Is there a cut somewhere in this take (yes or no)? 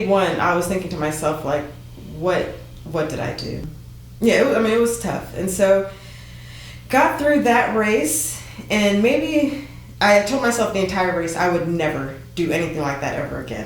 yes